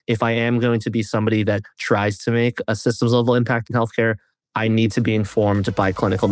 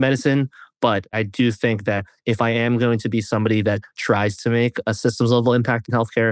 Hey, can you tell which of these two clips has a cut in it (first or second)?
second